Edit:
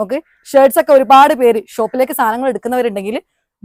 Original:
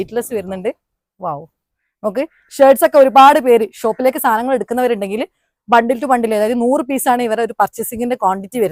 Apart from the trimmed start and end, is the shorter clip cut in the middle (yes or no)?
no